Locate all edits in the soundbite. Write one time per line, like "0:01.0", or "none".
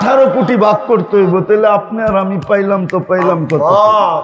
none